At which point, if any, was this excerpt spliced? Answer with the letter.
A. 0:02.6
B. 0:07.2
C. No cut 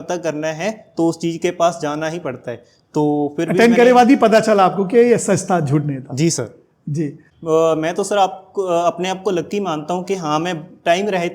B